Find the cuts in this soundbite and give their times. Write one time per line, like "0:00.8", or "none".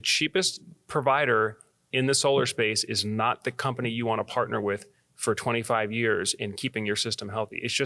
none